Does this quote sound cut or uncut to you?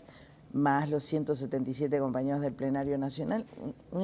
cut